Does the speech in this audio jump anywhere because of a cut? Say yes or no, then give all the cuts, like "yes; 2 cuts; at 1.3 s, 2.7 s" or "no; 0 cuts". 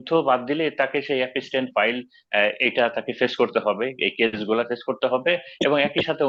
no; 0 cuts